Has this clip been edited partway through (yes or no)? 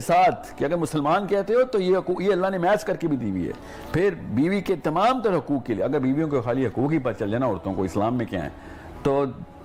no